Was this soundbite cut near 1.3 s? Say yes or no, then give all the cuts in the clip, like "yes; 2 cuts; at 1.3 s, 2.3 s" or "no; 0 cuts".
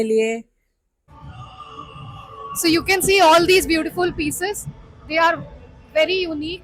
yes; 1 cut; at 1.3 s